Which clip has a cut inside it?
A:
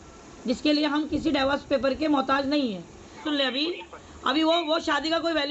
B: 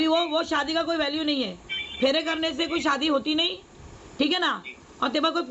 A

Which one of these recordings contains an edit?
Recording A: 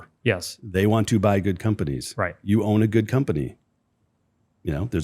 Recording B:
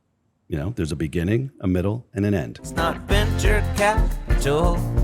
B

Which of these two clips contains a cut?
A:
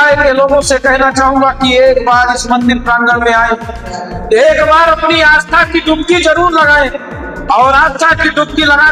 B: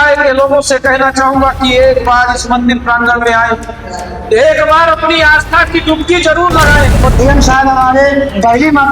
B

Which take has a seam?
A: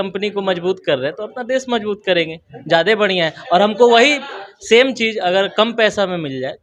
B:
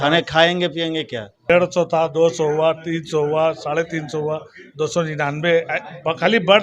B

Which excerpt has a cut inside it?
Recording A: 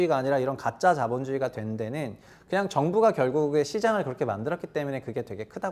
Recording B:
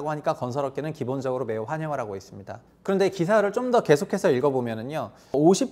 B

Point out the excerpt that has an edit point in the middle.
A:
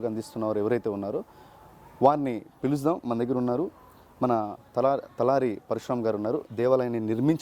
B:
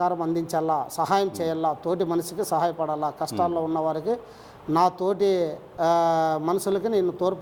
A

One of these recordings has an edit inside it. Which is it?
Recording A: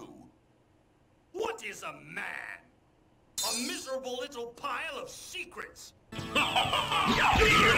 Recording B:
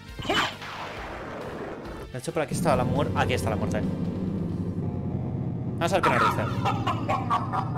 A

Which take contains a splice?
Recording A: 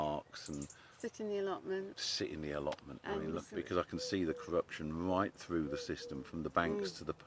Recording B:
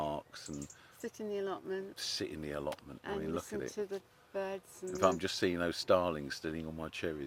A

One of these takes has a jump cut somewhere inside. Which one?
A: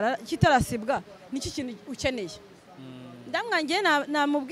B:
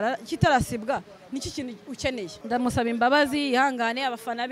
B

